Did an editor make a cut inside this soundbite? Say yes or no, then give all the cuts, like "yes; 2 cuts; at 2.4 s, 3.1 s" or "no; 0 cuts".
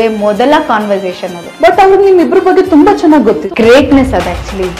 yes; 2 cuts; at 1.4 s, 3.4 s